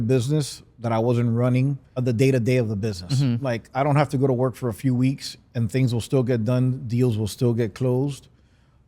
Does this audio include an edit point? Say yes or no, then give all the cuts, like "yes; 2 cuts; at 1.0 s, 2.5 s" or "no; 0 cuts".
yes; 1 cut; at 1.9 s